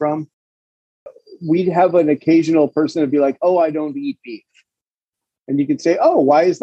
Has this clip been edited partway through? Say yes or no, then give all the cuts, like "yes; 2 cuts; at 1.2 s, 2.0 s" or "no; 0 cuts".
yes; 1 cut; at 1.0 s